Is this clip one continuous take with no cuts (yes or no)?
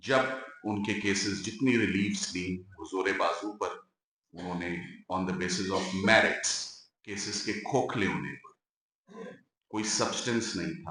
yes